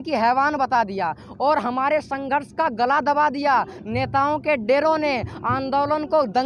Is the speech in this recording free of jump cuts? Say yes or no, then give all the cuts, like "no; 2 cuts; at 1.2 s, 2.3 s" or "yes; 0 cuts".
yes; 0 cuts